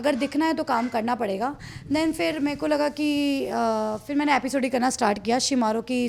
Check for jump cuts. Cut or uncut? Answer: uncut